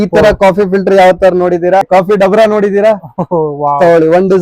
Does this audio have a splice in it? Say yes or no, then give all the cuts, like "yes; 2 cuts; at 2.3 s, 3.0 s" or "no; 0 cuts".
yes; 1 cut; at 1.9 s